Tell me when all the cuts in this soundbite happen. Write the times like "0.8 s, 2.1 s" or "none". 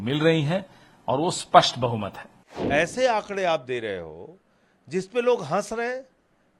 2.5 s